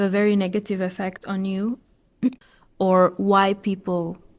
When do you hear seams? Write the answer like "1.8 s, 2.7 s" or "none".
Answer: 2.1 s